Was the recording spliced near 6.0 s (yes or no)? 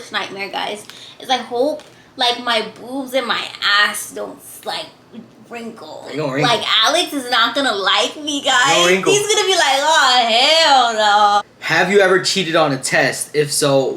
no